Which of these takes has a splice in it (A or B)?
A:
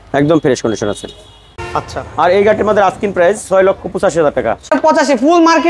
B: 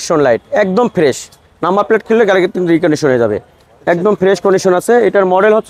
A